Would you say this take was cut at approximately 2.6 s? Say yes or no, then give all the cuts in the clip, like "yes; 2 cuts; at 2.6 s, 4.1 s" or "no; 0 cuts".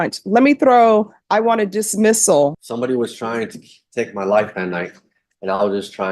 yes; 1 cut; at 2.6 s